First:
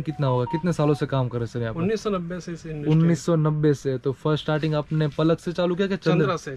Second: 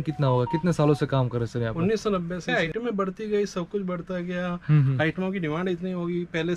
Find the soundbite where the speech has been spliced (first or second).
second